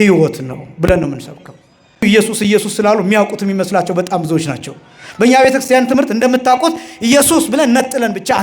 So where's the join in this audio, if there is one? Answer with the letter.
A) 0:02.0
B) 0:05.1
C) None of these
A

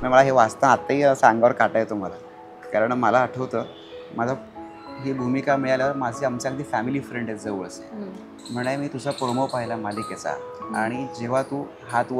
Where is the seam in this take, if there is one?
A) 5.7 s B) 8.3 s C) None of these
B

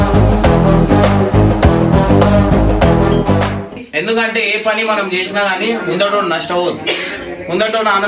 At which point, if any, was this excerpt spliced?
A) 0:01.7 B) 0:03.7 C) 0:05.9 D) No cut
B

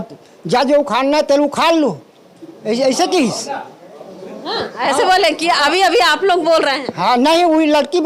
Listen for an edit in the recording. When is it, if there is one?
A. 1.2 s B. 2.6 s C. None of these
C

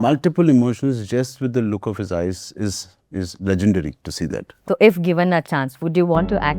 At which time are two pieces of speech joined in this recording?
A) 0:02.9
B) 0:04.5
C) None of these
B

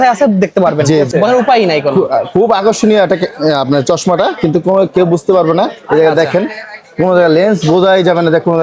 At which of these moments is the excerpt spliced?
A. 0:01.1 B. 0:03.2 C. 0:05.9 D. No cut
A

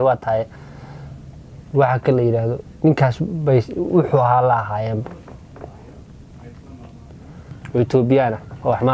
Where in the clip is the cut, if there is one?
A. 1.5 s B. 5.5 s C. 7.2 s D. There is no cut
C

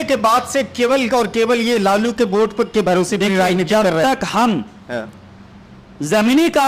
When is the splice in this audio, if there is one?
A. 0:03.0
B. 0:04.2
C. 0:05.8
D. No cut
D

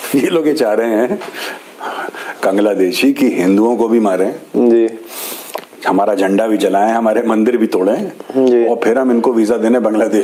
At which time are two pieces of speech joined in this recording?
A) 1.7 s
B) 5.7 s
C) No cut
C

